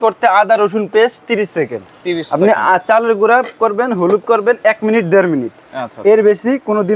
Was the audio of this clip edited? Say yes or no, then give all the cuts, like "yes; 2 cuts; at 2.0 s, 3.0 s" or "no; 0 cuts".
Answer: no; 0 cuts